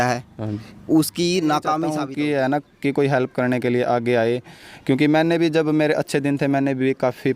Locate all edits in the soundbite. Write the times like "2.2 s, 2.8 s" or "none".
2.0 s